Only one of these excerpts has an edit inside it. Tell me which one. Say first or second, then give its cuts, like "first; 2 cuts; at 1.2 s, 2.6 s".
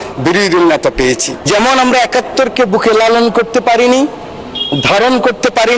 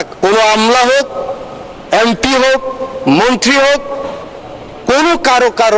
first; 1 cut; at 1.4 s